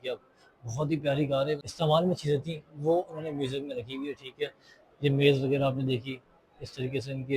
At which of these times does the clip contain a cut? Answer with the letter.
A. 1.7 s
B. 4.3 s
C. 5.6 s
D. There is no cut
A